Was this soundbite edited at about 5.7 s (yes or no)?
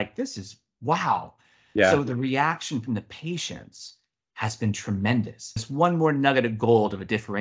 yes